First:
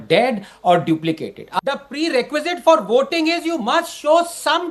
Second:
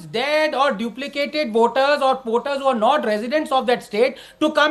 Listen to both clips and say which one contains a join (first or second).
first